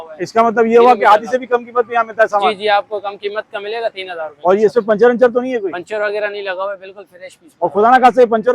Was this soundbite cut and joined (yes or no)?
no